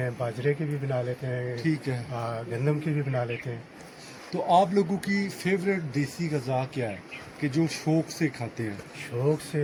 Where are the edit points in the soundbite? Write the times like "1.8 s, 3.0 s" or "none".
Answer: none

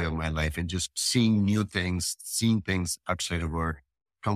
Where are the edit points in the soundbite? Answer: 1.0 s

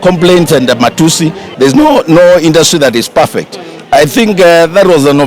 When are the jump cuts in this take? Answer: 1.4 s

